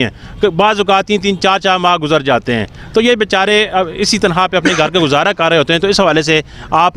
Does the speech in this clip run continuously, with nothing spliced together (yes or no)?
yes